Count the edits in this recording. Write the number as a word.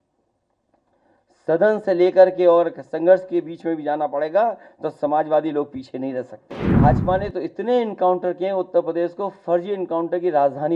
one